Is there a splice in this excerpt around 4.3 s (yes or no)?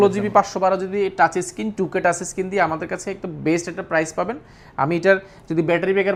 no